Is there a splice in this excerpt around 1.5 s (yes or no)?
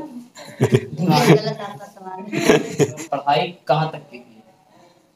no